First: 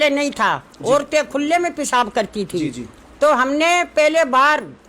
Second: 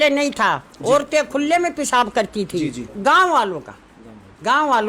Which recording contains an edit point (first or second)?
second